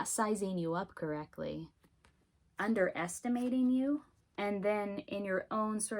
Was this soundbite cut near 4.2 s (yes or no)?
yes